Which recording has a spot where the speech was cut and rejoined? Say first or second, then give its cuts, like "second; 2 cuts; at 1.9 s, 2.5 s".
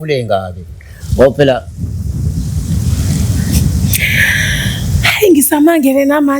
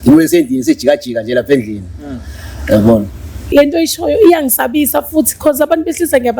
second; 1 cut; at 3.4 s